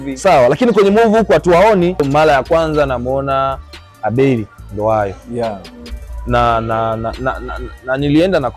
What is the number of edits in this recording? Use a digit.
1